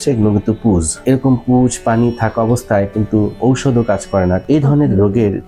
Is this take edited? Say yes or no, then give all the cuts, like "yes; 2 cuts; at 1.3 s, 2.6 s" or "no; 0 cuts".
yes; 2 cuts; at 1.0 s, 4.4 s